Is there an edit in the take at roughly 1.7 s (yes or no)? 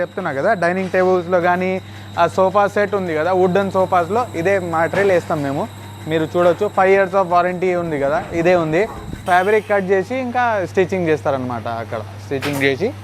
no